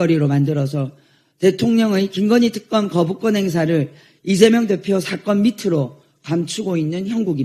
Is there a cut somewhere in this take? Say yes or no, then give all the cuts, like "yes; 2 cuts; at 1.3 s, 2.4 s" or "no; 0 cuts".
no; 0 cuts